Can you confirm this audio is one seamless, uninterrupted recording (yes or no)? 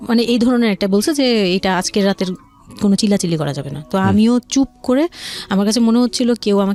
yes